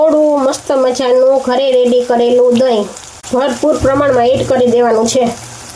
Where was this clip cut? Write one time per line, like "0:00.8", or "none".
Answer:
none